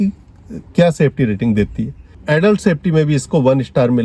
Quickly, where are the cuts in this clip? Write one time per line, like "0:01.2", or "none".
0:02.1